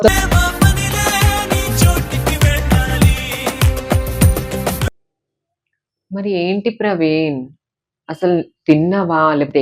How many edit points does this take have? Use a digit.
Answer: 1